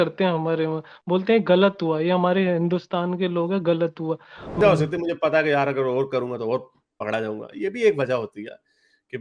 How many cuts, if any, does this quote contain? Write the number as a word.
one